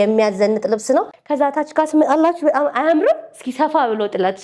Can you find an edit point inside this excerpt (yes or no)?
yes